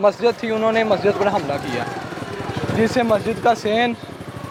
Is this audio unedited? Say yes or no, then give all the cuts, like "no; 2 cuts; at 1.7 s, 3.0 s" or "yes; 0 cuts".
yes; 0 cuts